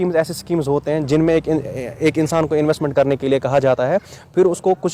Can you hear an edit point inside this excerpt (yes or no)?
no